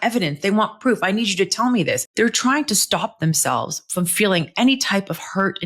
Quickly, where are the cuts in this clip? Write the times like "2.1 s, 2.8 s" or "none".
2.1 s